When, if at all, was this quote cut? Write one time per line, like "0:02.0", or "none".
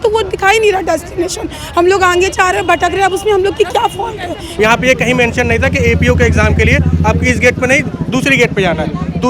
0:04.5